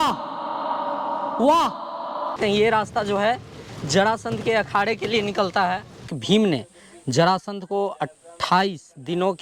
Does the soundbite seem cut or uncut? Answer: cut